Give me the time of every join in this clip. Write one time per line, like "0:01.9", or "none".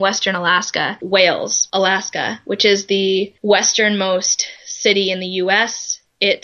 0:01.0
0:01.6
0:03.3